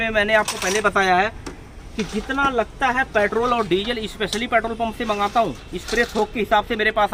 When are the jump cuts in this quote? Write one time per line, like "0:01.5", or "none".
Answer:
none